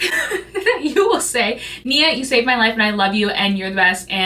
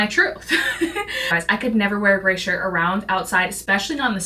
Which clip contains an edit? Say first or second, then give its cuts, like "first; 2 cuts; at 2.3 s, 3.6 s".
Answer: second; 1 cut; at 1.2 s